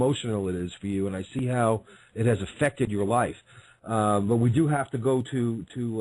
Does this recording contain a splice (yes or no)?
yes